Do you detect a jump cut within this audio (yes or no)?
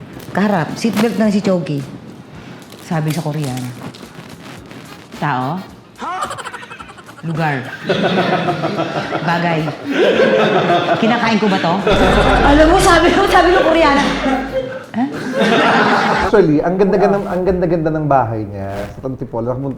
yes